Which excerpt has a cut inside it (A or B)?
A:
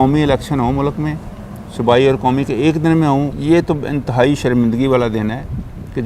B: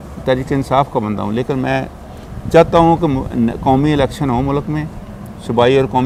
A